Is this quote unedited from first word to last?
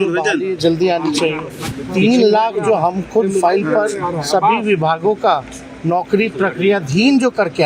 no; 1 cut; at 1.8 s

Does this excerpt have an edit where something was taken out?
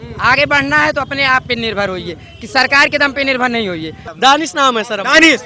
yes; 1 cut; at 4.0 s

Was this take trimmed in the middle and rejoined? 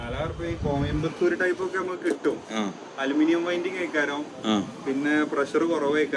no; 0 cuts

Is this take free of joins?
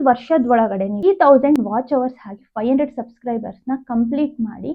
no; 1 cut; at 1.0 s

